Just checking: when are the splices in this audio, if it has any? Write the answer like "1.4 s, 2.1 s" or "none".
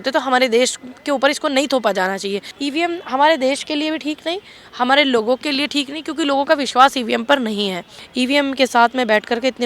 2.5 s, 8.0 s

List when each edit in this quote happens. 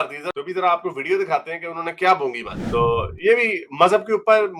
2.5 s

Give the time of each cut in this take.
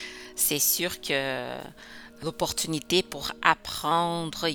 2.2 s

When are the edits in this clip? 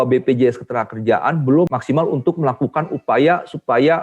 1.7 s

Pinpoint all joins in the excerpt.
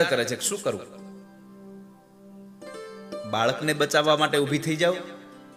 none

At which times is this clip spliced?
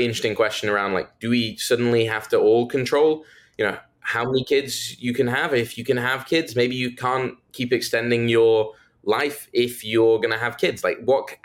none

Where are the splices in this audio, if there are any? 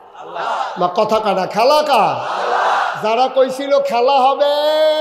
none

